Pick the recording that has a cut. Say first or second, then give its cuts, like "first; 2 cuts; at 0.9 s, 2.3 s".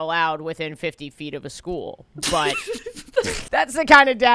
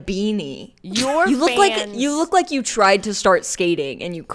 first; 1 cut; at 3.4 s